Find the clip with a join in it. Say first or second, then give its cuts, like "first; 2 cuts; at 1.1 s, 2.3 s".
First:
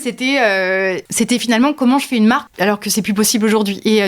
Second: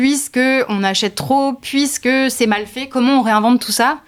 first; 2 cuts; at 1.0 s, 2.5 s